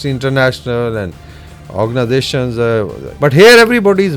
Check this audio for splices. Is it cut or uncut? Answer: cut